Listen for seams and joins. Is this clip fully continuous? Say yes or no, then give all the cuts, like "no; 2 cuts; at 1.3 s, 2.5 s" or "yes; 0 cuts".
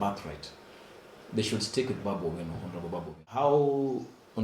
no; 1 cut; at 3.2 s